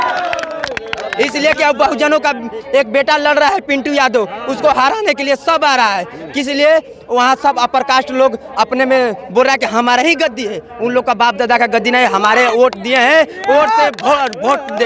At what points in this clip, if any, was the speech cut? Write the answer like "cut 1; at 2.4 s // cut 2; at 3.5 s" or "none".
none